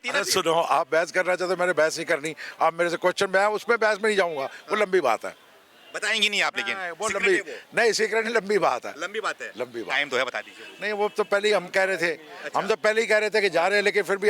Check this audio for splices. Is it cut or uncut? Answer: uncut